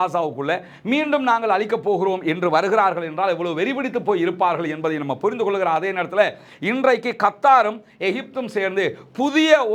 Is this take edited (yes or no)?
no